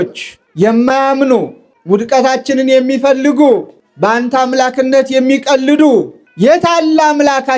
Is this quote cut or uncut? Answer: uncut